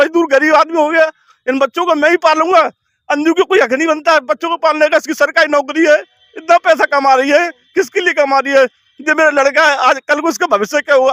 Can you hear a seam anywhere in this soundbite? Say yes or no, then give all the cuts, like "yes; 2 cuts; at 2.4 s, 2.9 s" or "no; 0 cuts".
no; 0 cuts